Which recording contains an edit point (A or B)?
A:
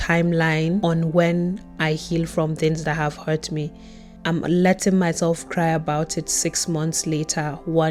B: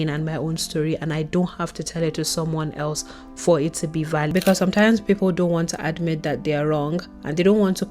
B